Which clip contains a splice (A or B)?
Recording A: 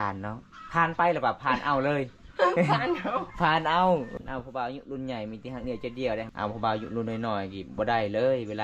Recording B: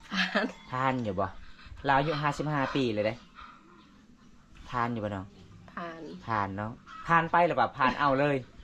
A